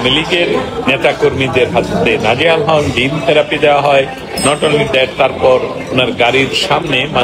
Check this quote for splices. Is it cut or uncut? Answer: uncut